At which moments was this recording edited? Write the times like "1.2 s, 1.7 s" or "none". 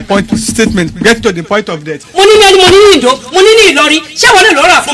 2.0 s